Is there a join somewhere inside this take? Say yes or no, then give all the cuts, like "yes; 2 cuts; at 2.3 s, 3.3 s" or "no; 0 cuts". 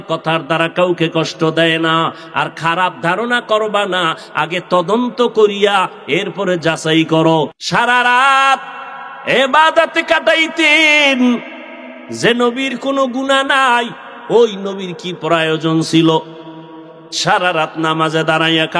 yes; 1 cut; at 7.6 s